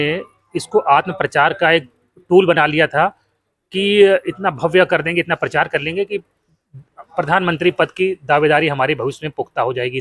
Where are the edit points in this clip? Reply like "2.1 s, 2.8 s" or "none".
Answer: none